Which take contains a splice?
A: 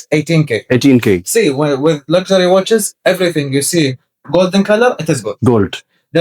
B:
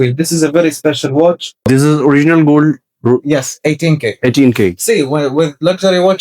B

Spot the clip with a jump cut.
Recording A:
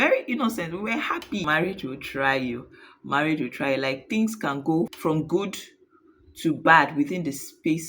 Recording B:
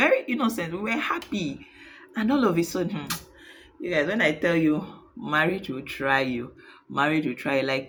A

